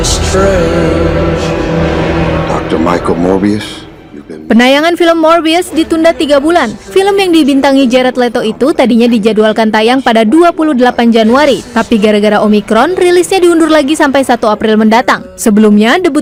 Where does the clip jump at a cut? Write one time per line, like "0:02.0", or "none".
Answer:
none